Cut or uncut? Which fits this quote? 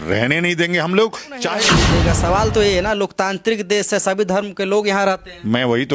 cut